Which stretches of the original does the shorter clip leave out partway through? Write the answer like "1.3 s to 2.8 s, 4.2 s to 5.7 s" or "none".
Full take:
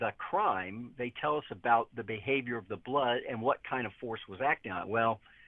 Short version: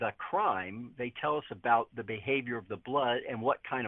none